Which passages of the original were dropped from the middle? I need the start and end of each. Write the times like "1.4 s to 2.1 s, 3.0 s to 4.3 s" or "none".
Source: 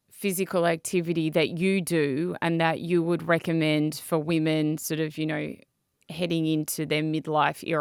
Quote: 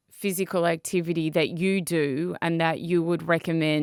none